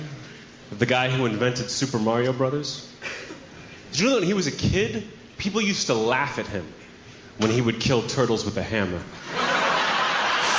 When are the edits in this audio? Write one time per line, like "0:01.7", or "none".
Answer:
none